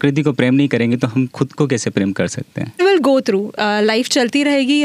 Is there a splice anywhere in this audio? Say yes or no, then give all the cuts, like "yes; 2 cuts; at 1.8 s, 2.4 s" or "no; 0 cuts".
yes; 1 cut; at 2.8 s